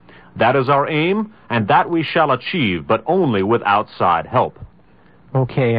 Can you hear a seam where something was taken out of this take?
yes; 1 cut; at 4.3 s

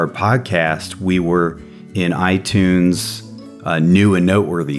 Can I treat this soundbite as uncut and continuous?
yes; 0 cuts

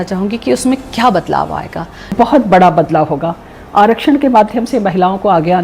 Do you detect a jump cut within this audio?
yes; 1 cut; at 2.0 s

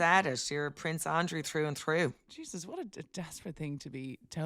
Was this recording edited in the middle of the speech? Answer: yes; 1 cut; at 2.3 s

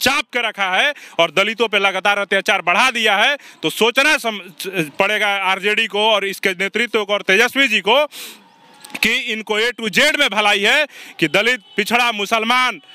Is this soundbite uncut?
yes; 0 cuts

